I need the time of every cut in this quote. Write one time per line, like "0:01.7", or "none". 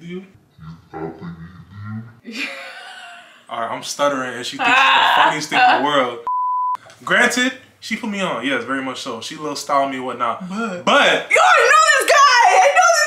0:02.1
0:06.7